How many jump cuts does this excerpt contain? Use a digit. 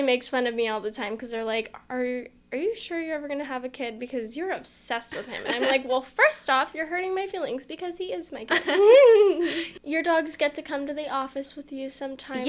1